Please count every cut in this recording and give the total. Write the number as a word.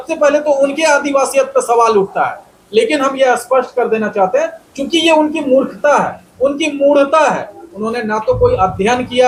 zero